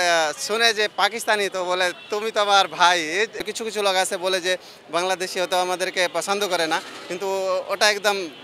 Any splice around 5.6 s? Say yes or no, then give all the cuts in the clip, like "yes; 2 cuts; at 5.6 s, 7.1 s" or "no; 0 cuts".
no; 1 cut; at 3.4 s